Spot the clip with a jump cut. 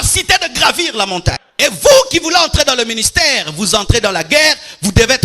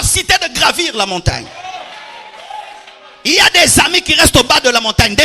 first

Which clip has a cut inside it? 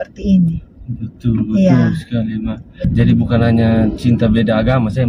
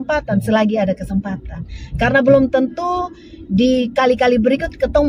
first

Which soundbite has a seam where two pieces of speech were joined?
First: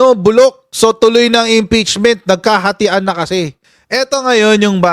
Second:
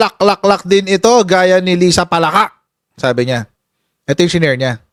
first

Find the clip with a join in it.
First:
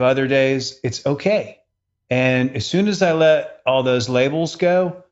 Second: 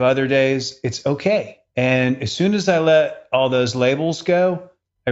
second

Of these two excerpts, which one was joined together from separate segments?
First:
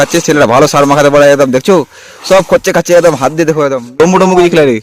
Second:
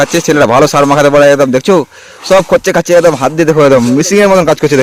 first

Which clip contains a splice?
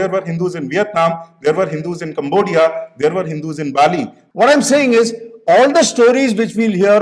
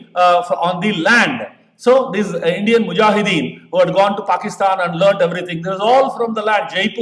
first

